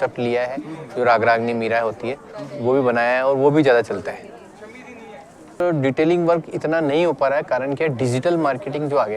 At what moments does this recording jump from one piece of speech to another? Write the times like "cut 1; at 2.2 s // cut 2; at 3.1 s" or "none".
cut 1; at 5.6 s